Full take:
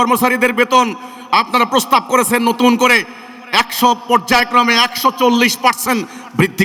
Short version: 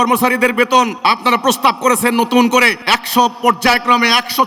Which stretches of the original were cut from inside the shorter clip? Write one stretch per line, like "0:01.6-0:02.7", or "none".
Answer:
0:00.9-0:01.2
0:03.1-0:03.4